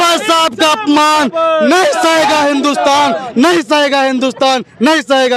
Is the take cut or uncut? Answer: uncut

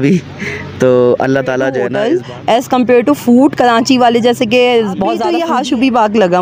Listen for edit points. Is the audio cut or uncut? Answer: cut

